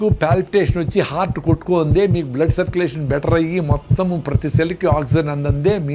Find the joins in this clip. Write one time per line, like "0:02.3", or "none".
none